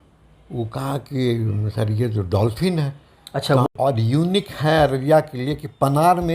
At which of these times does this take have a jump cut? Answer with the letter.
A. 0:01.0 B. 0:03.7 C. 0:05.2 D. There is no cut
B